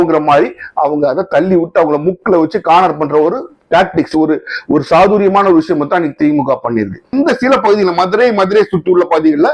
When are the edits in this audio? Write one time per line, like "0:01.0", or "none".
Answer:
0:07.1